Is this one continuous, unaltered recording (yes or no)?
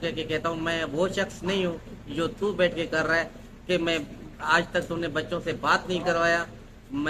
yes